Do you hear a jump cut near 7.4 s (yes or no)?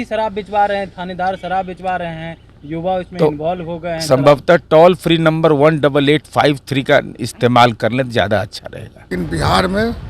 no